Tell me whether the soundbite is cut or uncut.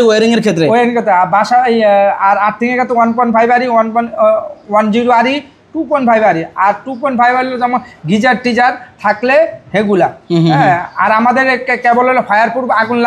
uncut